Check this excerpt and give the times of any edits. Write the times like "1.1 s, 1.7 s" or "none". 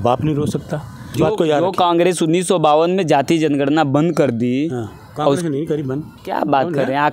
1.0 s, 6.1 s